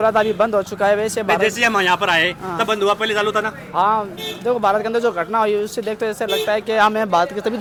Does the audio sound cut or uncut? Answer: uncut